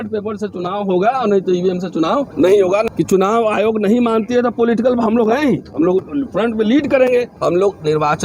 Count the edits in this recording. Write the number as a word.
three